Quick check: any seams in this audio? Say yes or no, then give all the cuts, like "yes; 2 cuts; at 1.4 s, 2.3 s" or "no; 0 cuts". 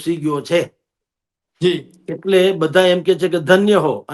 no; 0 cuts